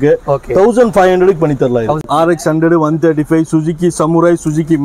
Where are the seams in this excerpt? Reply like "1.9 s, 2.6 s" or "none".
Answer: 2.0 s